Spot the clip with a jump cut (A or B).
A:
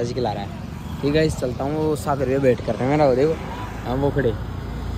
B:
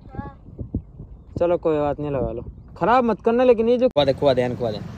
B